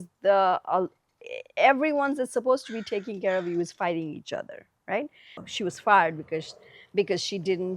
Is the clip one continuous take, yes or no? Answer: no